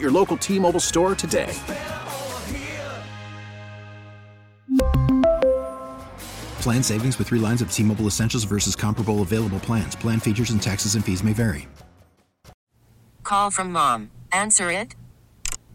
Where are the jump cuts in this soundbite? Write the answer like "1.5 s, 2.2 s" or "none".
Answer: 12.6 s